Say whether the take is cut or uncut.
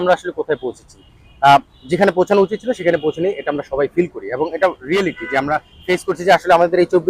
uncut